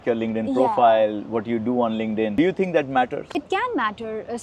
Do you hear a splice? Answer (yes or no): no